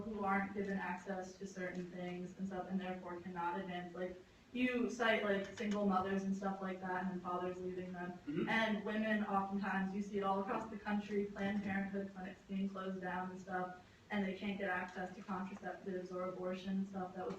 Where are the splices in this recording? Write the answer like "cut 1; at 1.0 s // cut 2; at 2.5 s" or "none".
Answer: cut 1; at 6.4 s

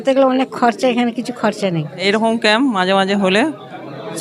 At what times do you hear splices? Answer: cut 1; at 2.0 s

